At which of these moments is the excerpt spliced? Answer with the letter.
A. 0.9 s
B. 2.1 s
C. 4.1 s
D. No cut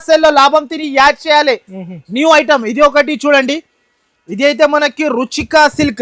D